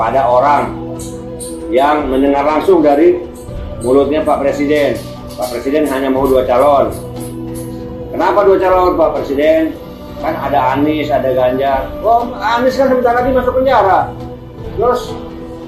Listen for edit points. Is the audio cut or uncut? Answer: uncut